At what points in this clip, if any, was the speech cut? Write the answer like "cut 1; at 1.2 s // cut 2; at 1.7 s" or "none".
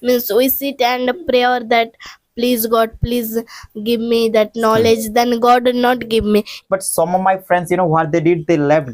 cut 1; at 6.5 s